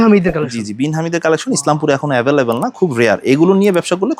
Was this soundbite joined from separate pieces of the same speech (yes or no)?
no